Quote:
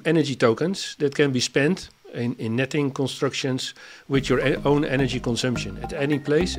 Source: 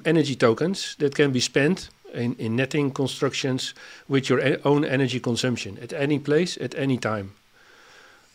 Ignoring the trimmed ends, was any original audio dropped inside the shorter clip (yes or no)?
no